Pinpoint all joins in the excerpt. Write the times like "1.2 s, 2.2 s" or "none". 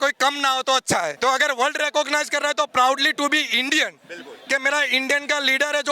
1.1 s